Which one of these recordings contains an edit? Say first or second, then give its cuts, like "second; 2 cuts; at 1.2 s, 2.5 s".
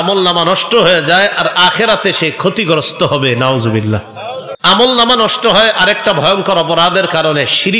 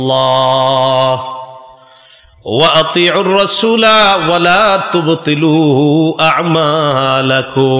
first; 1 cut; at 4.5 s